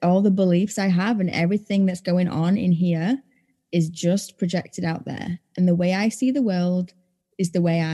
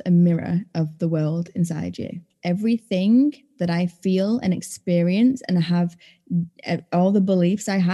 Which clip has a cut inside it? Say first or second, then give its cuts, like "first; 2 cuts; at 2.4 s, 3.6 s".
second; 1 cut; at 2.3 s